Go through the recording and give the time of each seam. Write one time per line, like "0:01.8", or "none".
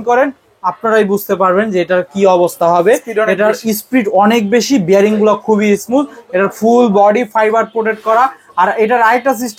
none